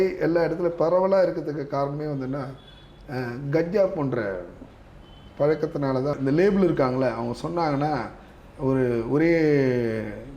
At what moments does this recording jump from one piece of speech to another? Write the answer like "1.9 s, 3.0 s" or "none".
6.1 s